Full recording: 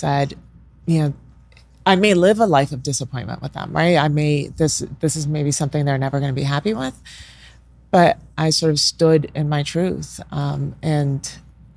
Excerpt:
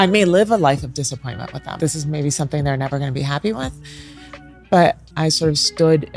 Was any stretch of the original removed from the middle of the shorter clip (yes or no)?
yes